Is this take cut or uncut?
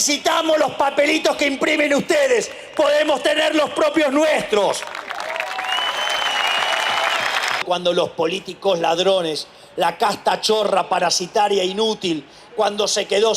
cut